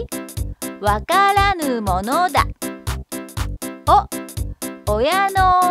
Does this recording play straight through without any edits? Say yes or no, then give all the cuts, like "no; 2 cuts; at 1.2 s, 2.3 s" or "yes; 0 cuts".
no; 1 cut; at 4.8 s